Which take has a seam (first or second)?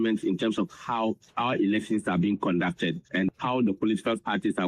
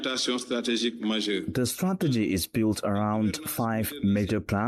first